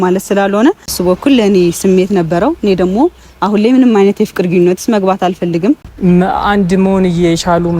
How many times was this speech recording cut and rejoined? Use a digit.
2